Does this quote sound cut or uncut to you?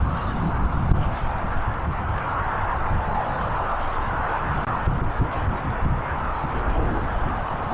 uncut